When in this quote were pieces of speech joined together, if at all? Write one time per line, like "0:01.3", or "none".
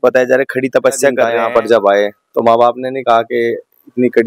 0:01.3